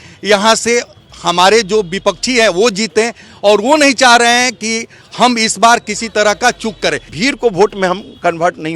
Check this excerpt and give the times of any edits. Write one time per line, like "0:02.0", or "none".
0:07.1

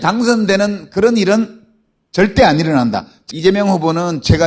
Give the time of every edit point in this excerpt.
0:03.1

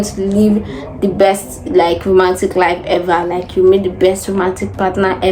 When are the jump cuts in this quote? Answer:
none

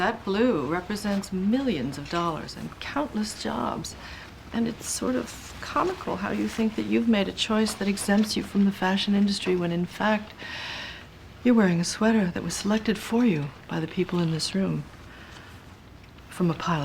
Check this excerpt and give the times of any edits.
none

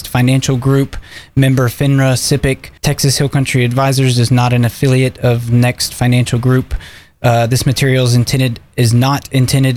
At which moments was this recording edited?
0:02.7

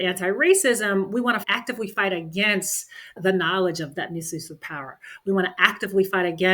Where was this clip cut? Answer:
0:01.5
0:04.0

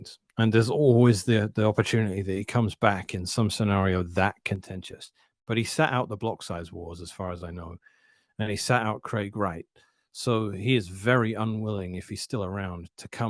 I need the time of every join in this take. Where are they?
none

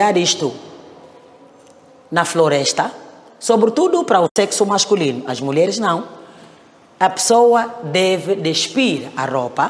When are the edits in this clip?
none

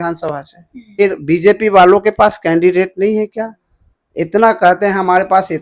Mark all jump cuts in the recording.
0:01.0

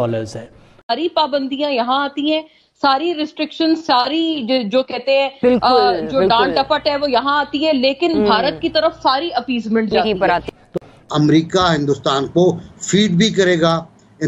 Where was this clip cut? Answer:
0:00.9
0:10.7

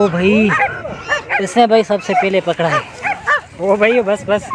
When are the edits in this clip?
none

